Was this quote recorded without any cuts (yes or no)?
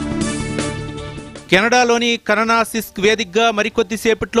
yes